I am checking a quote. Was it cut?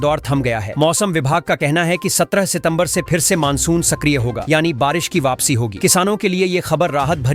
no; 0 cuts

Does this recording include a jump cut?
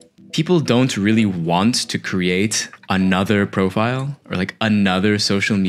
no; 0 cuts

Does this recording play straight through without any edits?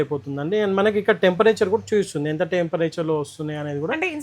yes; 0 cuts

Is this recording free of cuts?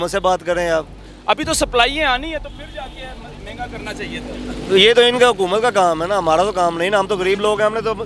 yes; 0 cuts

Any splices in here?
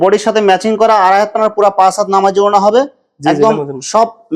no; 0 cuts

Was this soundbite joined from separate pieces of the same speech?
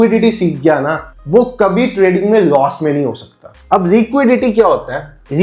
no; 0 cuts

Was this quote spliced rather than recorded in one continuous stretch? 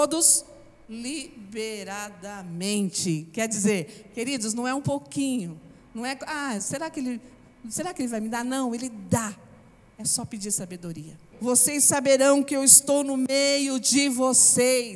yes; 1 cut; at 11.2 s

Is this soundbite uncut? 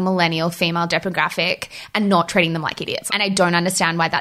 no; 1 cut; at 2.9 s

